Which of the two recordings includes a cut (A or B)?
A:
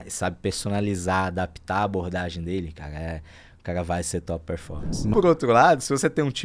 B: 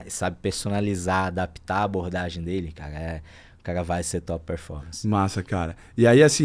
A